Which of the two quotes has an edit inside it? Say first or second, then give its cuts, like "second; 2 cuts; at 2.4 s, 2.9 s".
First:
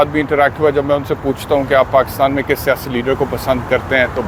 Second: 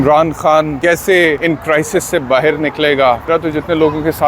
second; 3 cuts; at 0.8 s, 1.4 s, 3.3 s